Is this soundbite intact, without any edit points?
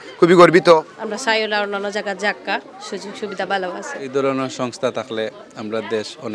no; 2 cuts; at 0.9 s, 4.1 s

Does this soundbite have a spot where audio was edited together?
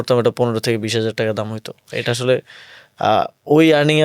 no; 0 cuts

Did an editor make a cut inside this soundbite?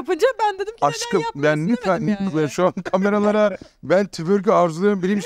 no; 0 cuts

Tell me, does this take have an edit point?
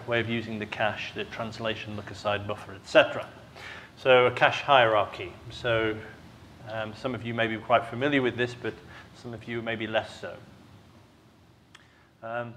yes; 1 cut; at 10.2 s

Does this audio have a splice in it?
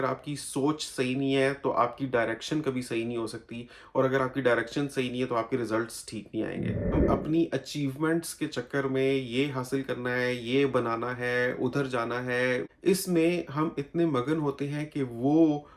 yes; 2 cuts; at 6.9 s, 12.7 s

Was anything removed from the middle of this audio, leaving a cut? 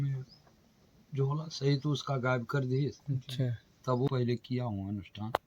yes; 1 cut; at 4.1 s

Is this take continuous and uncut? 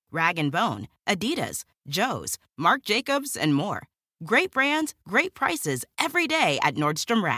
yes; 0 cuts

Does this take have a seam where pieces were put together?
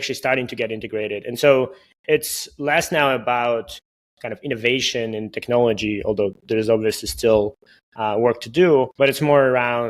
yes; 1 cut; at 8.9 s

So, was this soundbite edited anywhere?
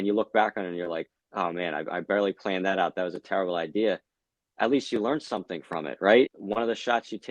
yes; 1 cut; at 6.3 s

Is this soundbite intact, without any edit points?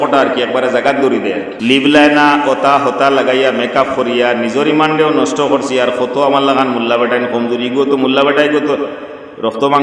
no; 1 cut; at 1.5 s

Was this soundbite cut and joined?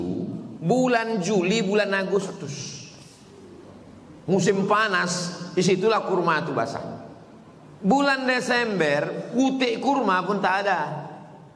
no; 0 cuts

